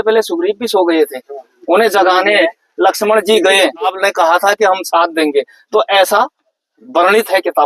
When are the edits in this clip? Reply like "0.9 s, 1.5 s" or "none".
3.9 s